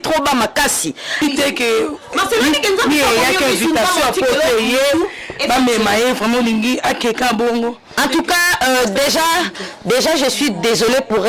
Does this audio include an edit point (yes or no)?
yes